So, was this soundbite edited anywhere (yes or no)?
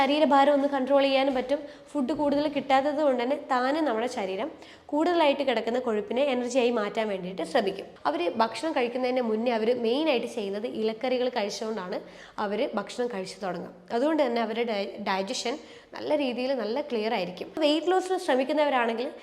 yes